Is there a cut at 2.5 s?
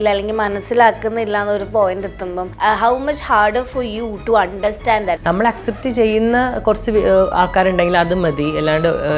yes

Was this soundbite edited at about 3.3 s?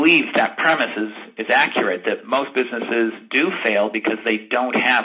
no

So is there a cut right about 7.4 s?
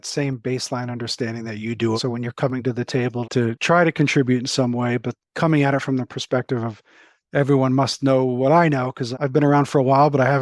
no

